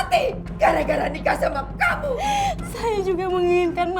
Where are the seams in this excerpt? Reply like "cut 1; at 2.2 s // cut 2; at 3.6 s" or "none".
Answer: cut 1; at 2.2 s